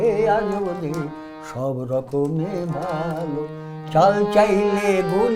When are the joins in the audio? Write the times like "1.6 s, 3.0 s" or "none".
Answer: none